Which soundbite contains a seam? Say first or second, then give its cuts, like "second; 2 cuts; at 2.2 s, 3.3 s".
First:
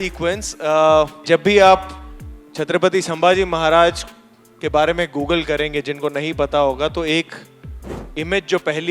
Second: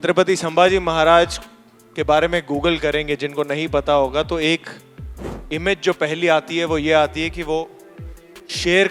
first; 1 cut; at 1.2 s